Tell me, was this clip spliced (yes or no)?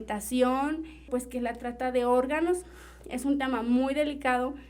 yes